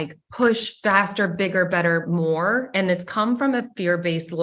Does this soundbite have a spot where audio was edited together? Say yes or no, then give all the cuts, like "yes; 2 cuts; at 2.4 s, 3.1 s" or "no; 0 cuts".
no; 0 cuts